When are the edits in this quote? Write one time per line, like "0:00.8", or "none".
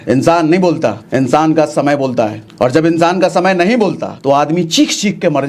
0:01.0
0:02.4
0:04.1